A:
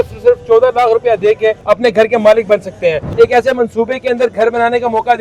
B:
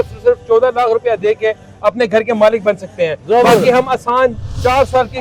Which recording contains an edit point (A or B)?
A